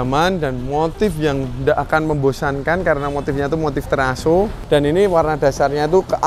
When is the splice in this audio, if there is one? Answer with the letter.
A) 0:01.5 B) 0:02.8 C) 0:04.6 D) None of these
C